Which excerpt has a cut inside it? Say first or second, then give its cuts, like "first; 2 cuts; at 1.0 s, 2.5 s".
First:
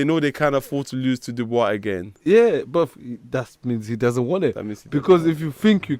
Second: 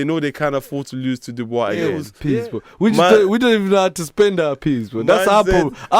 second; 1 cut; at 2.1 s